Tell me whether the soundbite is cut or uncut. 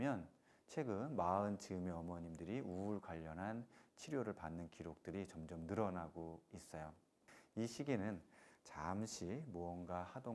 cut